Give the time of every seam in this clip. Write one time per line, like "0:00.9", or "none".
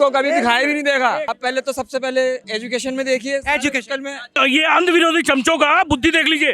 0:01.3
0:02.5
0:04.4